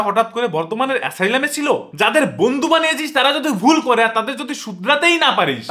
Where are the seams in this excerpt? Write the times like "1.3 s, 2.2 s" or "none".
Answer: 1.8 s